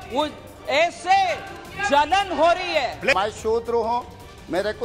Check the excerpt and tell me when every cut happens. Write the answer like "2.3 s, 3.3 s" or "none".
3.1 s